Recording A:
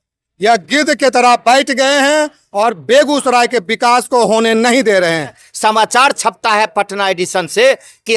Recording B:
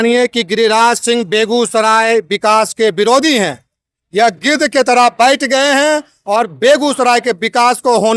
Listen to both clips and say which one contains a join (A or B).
A